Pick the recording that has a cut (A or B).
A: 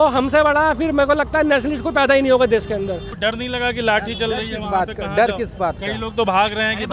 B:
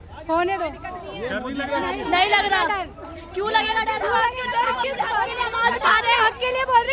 A